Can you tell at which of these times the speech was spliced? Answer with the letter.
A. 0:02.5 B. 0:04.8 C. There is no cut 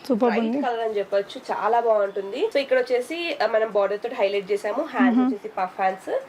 A